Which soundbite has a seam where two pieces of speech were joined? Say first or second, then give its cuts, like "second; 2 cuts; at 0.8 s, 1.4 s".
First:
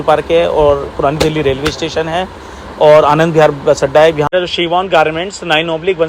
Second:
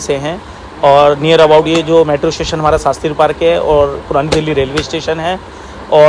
first; 1 cut; at 4.3 s